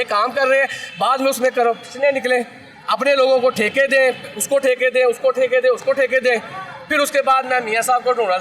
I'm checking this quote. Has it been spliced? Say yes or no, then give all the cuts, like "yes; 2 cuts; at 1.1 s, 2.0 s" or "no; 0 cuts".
no; 0 cuts